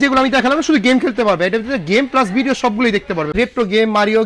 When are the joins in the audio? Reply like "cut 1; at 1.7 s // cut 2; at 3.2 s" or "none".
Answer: cut 1; at 3.3 s